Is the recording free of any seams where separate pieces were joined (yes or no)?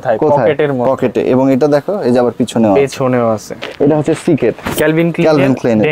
no